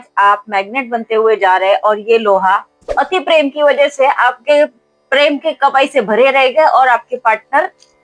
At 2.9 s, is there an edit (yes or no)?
yes